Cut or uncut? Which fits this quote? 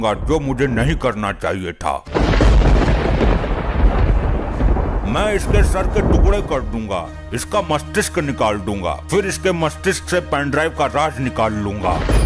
cut